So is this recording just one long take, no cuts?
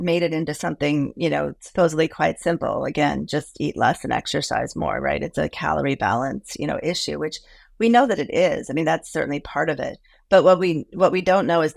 yes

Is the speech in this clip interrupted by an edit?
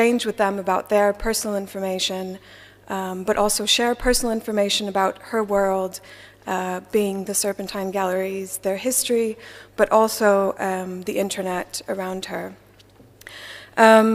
no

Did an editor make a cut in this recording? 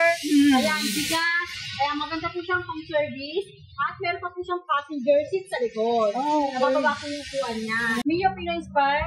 yes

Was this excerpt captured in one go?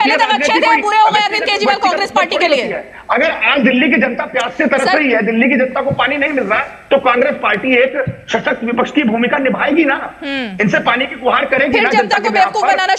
yes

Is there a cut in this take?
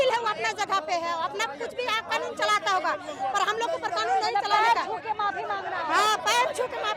no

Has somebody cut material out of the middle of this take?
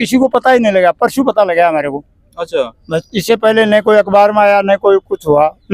no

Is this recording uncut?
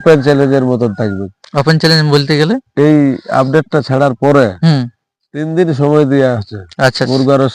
yes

